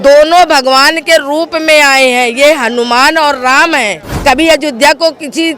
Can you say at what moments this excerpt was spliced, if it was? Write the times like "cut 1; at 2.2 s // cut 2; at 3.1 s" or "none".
cut 1; at 4.0 s